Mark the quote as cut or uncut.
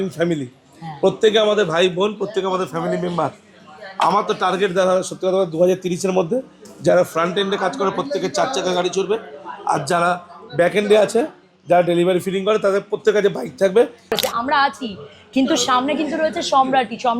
cut